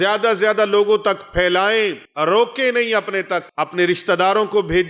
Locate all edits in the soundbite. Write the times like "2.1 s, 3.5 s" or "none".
2.1 s, 3.5 s

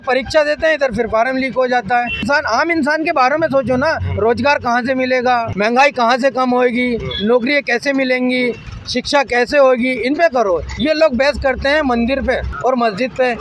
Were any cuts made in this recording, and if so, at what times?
2.2 s, 5.5 s, 12.5 s

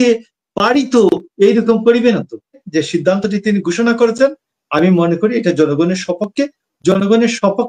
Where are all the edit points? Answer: 2.6 s

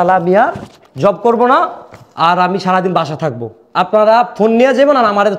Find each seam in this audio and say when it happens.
none

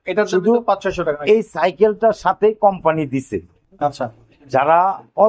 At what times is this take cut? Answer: 3.6 s

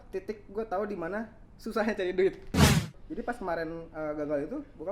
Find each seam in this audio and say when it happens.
2.9 s

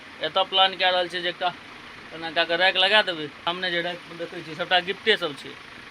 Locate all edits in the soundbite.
3.5 s

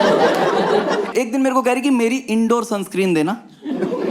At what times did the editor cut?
1.1 s

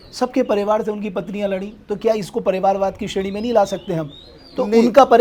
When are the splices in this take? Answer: none

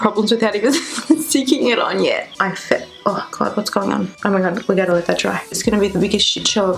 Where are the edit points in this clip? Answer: 2.3 s, 4.1 s

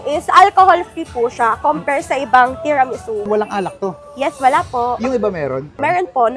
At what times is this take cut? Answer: 3.2 s

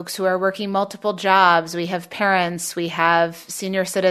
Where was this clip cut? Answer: none

